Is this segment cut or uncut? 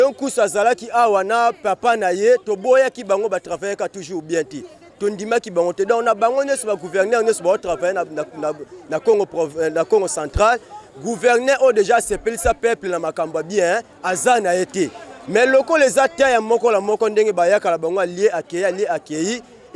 uncut